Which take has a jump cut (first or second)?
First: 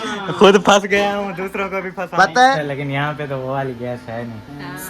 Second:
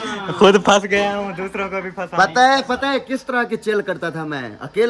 first